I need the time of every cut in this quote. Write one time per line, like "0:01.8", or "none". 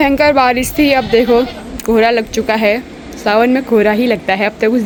none